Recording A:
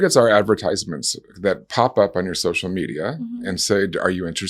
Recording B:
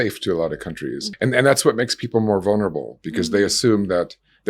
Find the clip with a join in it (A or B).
B